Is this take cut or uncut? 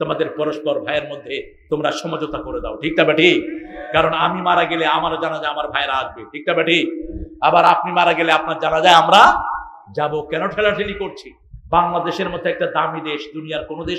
uncut